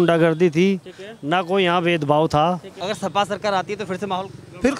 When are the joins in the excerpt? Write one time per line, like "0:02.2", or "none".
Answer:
0:02.7

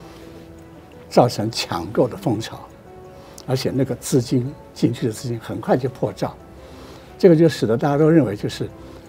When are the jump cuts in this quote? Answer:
0:06.6

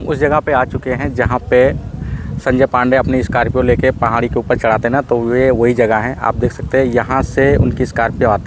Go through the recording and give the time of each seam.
none

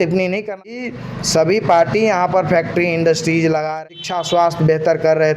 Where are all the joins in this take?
0:00.8
0:03.7

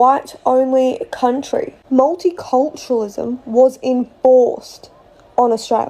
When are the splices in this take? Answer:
0:01.4

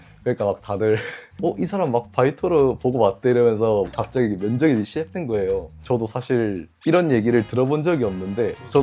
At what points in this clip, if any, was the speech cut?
0:01.3
0:03.9
0:05.7

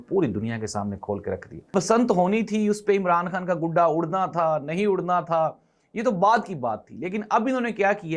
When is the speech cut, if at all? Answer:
0:01.7

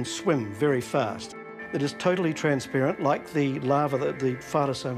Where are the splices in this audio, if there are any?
0:03.8

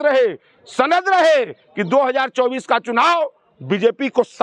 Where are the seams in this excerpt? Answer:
none

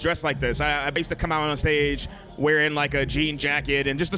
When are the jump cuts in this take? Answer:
0:01.0

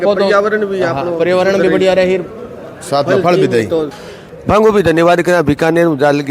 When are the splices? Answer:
0:04.0

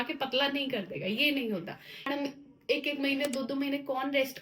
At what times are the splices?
0:02.0

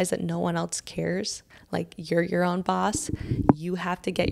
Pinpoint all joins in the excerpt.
none

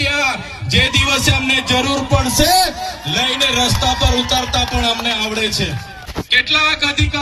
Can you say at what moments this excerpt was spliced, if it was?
0:06.0

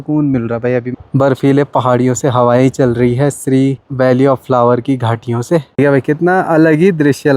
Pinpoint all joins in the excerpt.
0:00.9
0:03.8
0:05.7

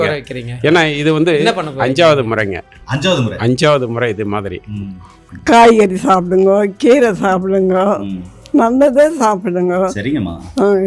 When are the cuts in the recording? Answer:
0:05.2

